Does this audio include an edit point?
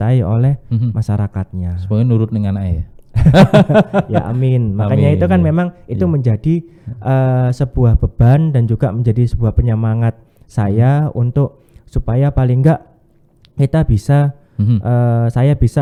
no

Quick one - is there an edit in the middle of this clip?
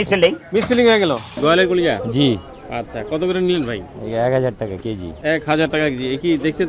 yes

